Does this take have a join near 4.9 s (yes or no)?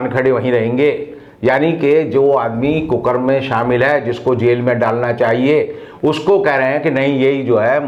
no